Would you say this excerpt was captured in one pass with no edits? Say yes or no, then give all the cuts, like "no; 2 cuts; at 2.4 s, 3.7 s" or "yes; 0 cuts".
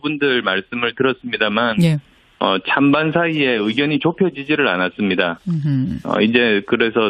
yes; 0 cuts